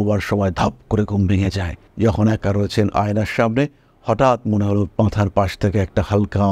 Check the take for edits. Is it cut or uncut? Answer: uncut